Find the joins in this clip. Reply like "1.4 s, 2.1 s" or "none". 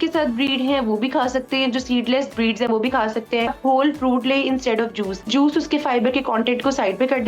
3.5 s, 5.3 s